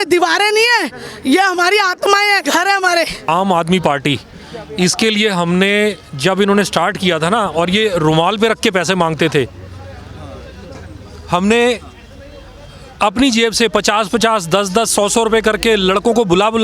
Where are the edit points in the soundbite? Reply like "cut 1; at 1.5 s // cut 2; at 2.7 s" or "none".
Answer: cut 1; at 3.3 s